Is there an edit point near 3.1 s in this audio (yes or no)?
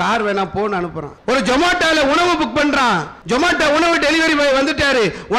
yes